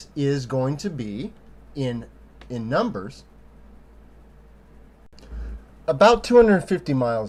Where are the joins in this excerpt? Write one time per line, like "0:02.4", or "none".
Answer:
none